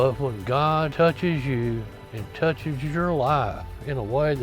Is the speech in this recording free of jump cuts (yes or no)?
no